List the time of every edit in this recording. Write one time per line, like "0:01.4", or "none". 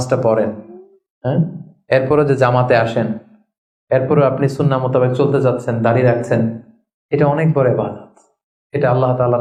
none